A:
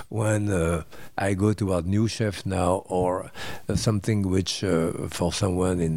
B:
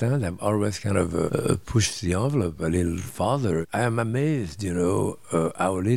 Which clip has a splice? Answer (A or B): B